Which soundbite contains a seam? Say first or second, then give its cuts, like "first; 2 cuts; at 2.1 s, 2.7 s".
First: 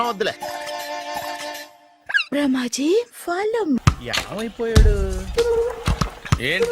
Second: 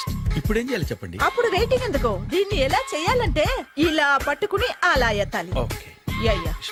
first; 1 cut; at 3.7 s